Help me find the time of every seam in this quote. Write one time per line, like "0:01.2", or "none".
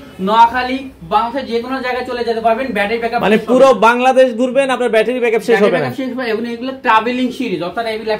none